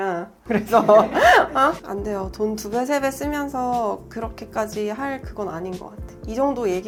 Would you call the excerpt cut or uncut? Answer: uncut